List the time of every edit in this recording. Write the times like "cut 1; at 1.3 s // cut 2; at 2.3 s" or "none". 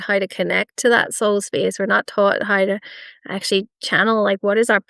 none

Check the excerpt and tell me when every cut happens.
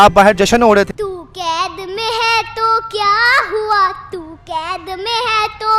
cut 1; at 0.9 s

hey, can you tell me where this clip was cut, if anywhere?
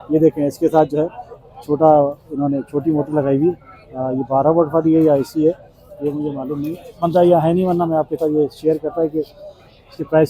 none

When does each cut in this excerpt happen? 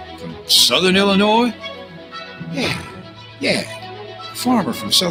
none

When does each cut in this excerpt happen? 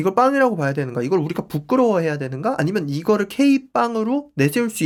none

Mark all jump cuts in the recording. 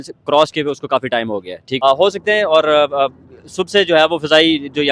cut 1; at 1.6 s

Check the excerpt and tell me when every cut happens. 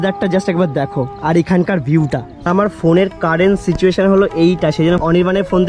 cut 1; at 2.5 s

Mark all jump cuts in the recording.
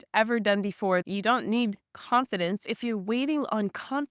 cut 1; at 1.1 s // cut 2; at 2.6 s

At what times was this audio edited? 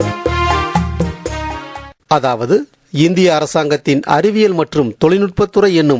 cut 1; at 1.9 s

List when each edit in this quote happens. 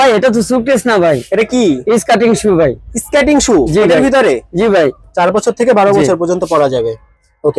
cut 1; at 5.0 s

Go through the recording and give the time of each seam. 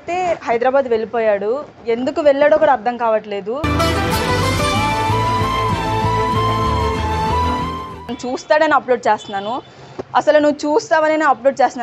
cut 1; at 8.2 s

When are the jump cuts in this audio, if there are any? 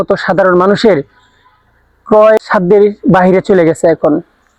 cut 1; at 2.4 s

